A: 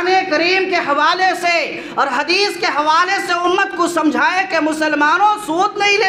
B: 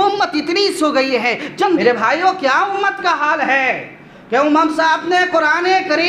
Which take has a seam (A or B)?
B